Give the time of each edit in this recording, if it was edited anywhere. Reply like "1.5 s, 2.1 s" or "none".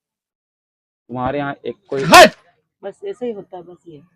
none